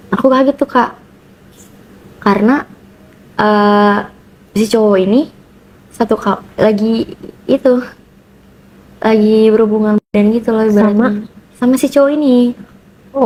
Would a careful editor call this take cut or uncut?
uncut